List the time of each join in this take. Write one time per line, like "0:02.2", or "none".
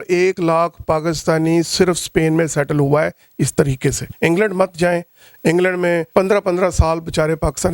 0:04.1
0:06.1